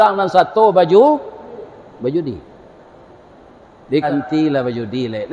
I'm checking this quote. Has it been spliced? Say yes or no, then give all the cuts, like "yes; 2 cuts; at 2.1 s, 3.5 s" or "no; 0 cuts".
yes; 1 cut; at 4.1 s